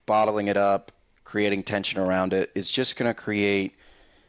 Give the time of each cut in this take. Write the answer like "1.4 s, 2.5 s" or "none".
none